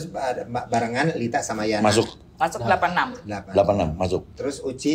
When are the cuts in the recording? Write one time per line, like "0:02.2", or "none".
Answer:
none